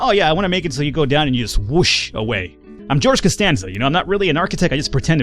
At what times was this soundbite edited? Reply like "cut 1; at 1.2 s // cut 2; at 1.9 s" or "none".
cut 1; at 2.6 s